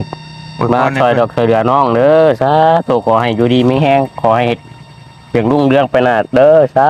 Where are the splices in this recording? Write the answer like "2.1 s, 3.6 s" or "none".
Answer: none